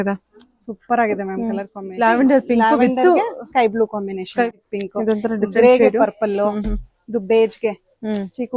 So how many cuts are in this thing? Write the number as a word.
two